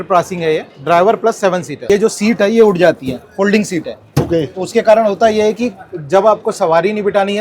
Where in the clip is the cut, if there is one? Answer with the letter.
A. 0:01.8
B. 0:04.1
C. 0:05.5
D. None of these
A